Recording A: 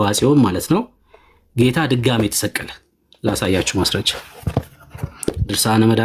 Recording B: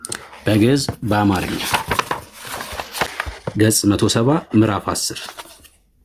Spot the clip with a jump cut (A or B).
B